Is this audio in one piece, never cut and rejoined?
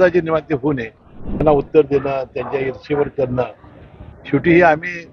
no; 1 cut; at 1.4 s

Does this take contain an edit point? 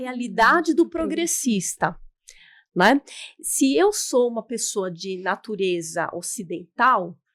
no; 0 cuts

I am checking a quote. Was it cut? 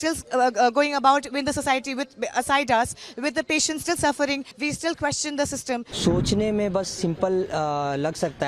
yes; 2 cuts; at 4.5 s, 5.9 s

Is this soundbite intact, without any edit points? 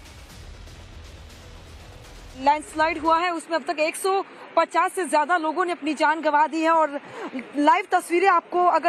yes; 0 cuts

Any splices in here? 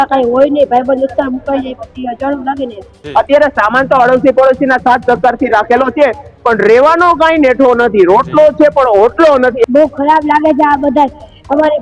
yes; 2 cuts; at 2.9 s, 9.6 s

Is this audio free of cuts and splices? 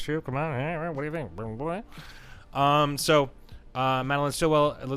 yes; 0 cuts

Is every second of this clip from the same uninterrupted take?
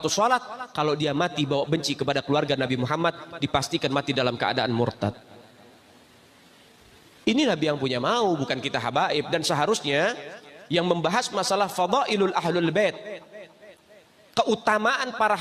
yes; 0 cuts

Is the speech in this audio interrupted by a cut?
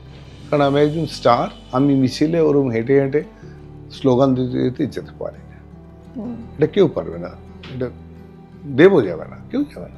no; 0 cuts

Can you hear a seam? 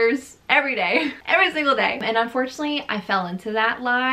yes; 1 cut; at 2.0 s

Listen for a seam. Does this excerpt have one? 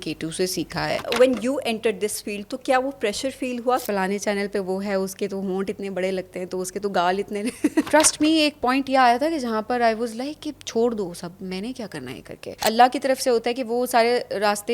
yes; 4 cuts; at 1.1 s, 3.8 s, 7.8 s, 12.6 s

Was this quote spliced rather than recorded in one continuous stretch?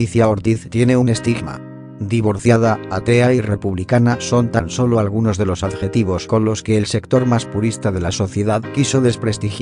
no; 0 cuts

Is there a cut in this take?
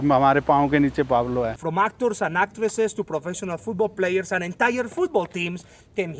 yes; 1 cut; at 1.6 s

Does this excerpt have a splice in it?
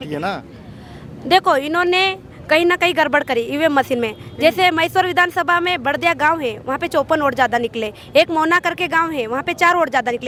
no; 0 cuts

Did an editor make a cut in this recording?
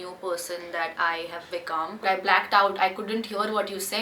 yes; 1 cut; at 2.0 s

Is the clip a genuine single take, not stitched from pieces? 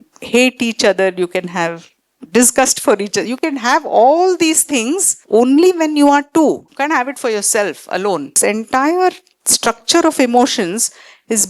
no; 3 cuts; at 5.1 s, 6.7 s, 8.4 s

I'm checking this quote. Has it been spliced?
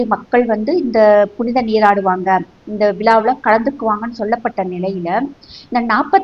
no; 0 cuts

